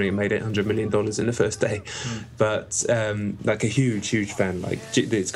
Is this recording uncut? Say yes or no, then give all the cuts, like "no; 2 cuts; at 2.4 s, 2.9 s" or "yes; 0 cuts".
no; 1 cut; at 3.1 s